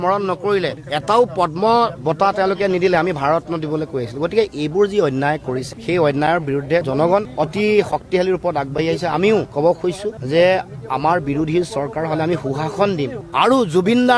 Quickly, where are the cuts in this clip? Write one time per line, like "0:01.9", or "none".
0:13.2

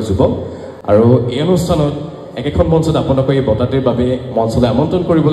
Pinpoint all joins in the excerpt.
none

